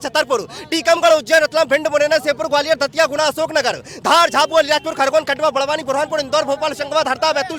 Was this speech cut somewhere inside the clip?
no; 0 cuts

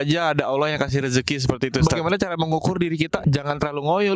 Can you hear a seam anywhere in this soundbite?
yes; 2 cuts; at 1.8 s, 3.2 s

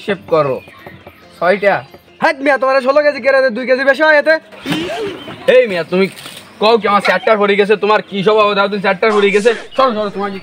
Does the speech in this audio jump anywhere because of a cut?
no; 0 cuts

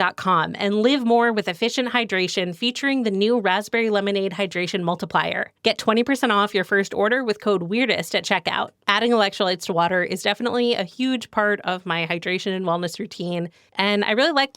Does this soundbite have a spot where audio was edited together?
yes; 1 cut; at 13.6 s

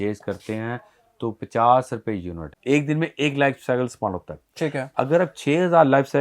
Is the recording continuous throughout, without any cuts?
no; 1 cut; at 2.5 s

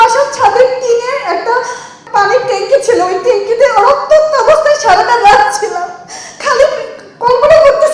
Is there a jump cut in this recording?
yes; 1 cut; at 2.0 s

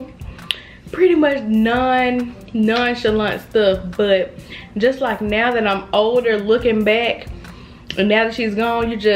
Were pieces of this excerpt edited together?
no; 0 cuts

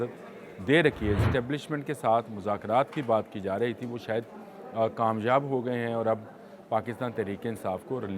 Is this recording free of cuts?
no; 1 cut; at 1.2 s

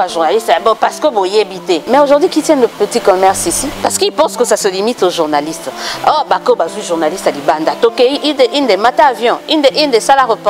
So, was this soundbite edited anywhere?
yes; 2 cuts; at 1.8 s, 3.7 s

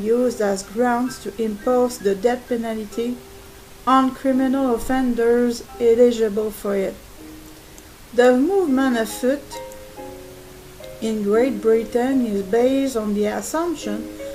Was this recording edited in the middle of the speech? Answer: no; 0 cuts

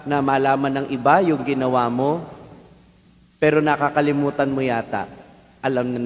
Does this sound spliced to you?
no; 0 cuts

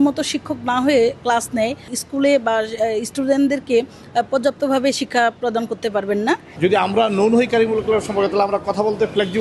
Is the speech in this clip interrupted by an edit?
yes; 2 cuts; at 1.9 s, 6.5 s

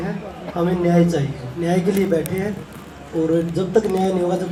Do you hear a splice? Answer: no; 0 cuts

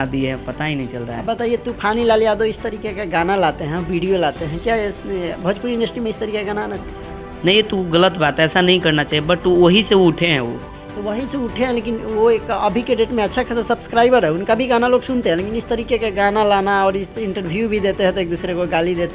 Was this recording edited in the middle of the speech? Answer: no; 0 cuts

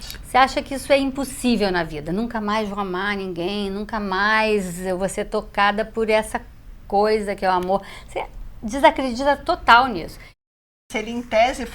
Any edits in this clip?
yes; 1 cut; at 10.5 s

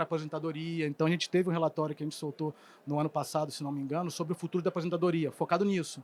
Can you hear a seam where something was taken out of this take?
no; 0 cuts

